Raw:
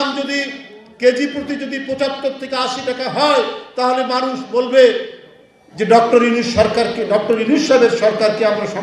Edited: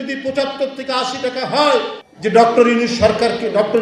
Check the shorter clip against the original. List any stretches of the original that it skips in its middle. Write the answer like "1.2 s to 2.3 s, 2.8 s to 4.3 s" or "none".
3.6 s to 5.5 s